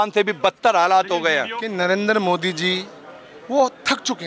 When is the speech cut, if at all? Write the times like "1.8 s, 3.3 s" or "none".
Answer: 1.6 s